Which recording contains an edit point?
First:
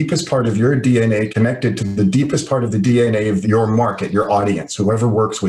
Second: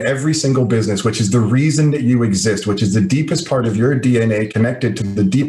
first; 1 cut; at 3.4 s

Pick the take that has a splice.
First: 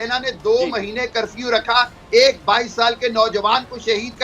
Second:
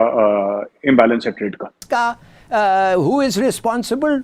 second; 1 cut; at 1.8 s

